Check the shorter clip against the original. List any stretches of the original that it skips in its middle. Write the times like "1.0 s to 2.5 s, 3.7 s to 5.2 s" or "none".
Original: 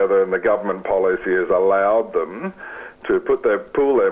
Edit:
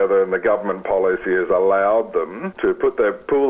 2.4 s to 2.9 s